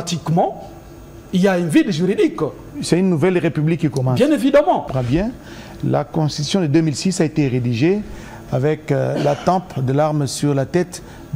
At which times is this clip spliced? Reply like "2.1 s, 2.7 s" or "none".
4.9 s